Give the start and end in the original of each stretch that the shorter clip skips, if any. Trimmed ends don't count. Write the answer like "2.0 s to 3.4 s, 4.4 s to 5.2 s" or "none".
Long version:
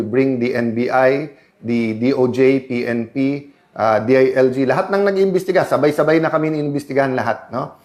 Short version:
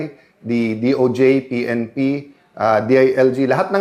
none